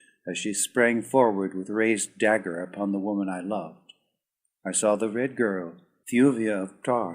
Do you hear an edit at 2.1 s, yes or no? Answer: no